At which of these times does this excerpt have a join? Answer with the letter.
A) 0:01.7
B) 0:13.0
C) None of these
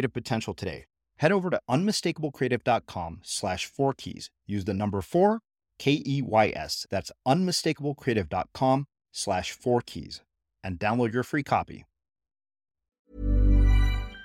B